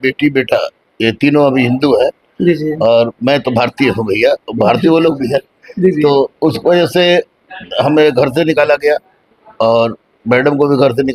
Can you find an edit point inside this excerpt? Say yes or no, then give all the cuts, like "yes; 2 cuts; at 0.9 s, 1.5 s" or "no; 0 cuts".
no; 0 cuts